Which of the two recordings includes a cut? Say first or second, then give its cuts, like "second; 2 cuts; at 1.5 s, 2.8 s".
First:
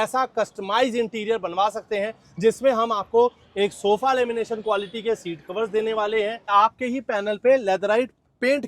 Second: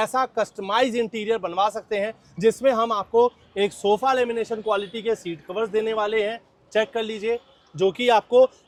first; 1 cut; at 6.5 s